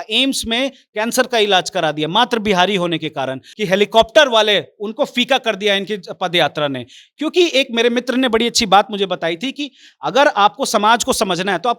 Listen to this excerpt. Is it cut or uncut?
cut